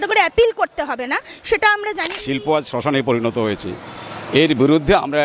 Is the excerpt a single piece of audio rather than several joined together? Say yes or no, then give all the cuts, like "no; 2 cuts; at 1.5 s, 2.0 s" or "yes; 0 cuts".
no; 1 cut; at 2.2 s